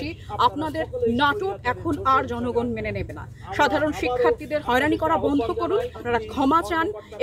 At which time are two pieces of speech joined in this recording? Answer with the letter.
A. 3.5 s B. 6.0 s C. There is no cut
B